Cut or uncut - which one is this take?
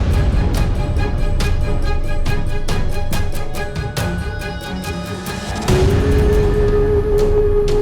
uncut